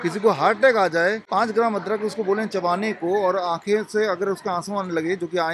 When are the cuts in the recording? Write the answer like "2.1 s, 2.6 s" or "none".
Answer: 1.2 s